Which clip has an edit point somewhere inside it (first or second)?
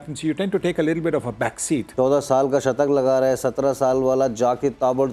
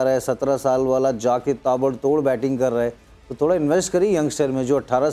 first